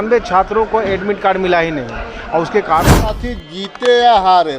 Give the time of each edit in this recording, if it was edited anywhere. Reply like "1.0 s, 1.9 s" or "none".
3.1 s